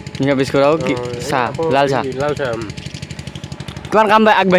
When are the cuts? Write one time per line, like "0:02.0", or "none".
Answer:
none